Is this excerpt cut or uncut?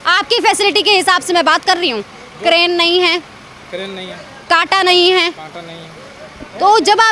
uncut